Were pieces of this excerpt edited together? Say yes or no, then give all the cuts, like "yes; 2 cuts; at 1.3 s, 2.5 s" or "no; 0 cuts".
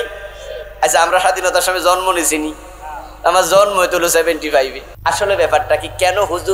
yes; 1 cut; at 4.9 s